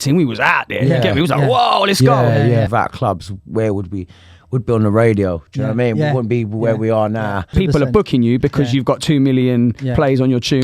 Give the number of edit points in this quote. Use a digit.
2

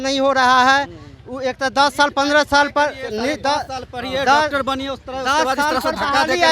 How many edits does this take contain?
0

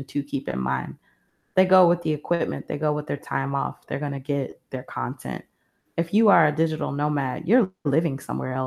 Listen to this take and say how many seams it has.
0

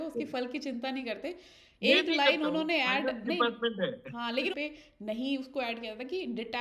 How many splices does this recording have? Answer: 1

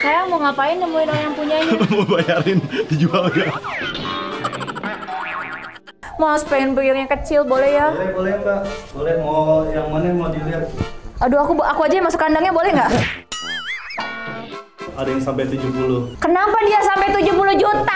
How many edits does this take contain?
3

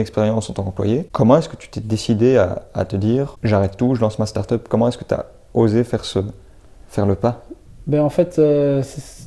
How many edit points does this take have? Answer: 2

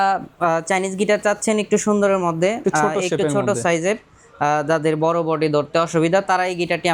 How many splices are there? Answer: 0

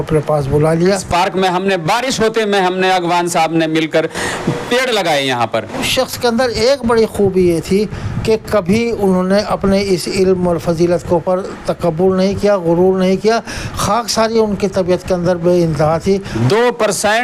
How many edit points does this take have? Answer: 3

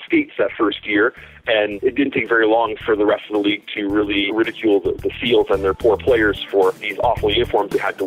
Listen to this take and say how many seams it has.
3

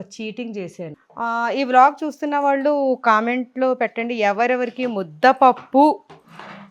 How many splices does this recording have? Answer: 1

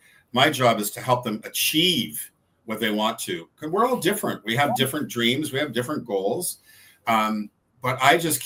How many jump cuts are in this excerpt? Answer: 0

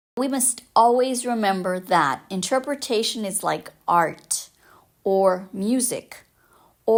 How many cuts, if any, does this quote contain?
0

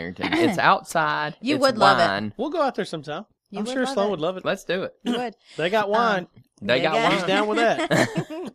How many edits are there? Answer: 0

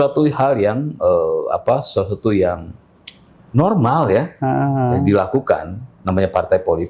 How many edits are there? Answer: 0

